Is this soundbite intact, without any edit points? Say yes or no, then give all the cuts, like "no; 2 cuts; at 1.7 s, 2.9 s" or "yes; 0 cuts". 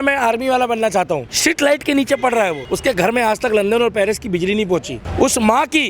no; 3 cuts; at 1.3 s, 2.7 s, 5.0 s